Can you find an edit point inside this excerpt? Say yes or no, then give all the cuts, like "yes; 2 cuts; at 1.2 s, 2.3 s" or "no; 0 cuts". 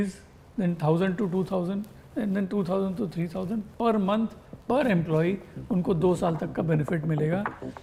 no; 0 cuts